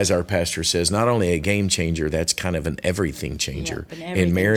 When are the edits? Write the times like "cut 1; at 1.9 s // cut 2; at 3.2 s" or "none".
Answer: none